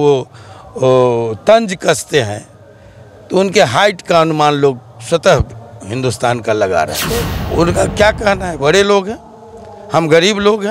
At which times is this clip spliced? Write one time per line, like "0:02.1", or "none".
0:07.4